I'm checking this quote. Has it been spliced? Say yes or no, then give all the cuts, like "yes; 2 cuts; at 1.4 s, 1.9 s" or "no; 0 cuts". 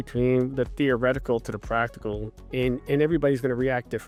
no; 0 cuts